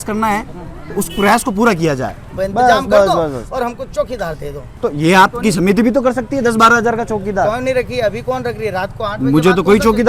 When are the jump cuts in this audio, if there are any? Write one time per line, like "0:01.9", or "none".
0:02.2
0:04.7